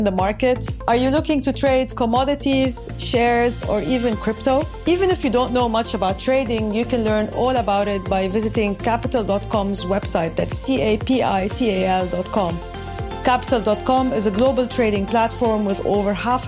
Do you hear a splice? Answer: no; 0 cuts

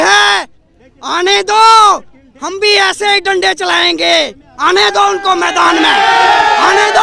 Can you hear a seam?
no; 0 cuts

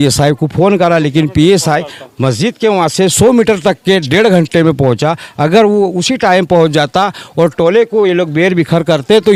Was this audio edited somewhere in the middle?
no; 0 cuts

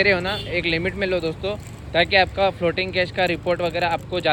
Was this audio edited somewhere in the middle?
no; 0 cuts

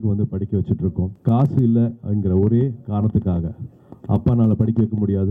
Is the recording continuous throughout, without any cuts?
no; 1 cut; at 1.1 s

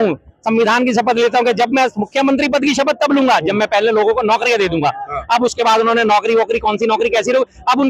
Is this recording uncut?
yes; 0 cuts

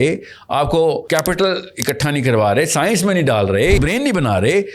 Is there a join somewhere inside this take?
yes; 2 cuts; at 1.0 s, 3.8 s

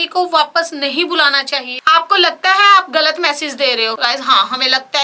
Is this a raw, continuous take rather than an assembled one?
no; 1 cut; at 1.8 s

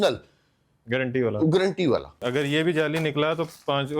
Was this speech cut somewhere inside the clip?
yes; 1 cut; at 2.2 s

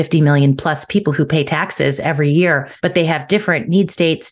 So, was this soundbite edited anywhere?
yes; 1 cut; at 2.7 s

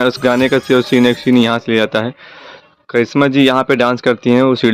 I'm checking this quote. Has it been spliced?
no; 0 cuts

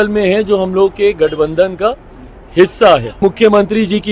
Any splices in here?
yes; 1 cut; at 3.2 s

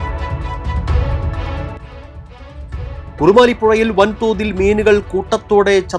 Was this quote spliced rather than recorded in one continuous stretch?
yes; 2 cuts; at 1.5 s, 3.0 s

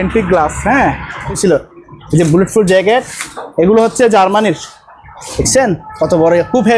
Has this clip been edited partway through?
yes; 1 cut; at 1.3 s

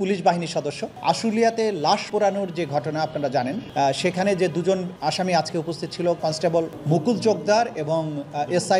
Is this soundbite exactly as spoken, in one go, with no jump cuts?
no; 1 cut; at 1.0 s

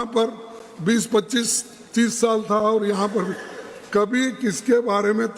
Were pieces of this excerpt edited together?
no; 0 cuts

